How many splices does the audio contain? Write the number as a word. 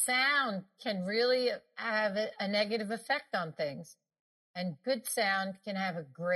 one